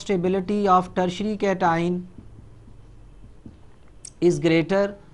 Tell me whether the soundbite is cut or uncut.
uncut